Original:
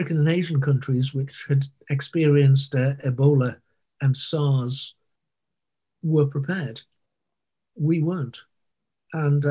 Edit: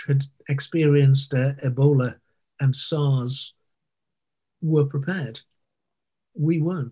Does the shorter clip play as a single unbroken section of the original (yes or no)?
yes